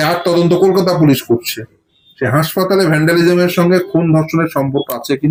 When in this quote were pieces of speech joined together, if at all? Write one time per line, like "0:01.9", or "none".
none